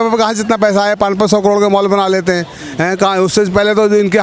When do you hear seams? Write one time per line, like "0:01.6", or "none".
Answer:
none